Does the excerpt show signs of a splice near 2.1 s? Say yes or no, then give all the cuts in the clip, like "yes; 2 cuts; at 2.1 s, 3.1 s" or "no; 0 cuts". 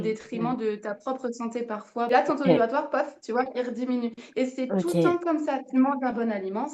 yes; 1 cut; at 2.1 s